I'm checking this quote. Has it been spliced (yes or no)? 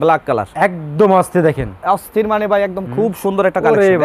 no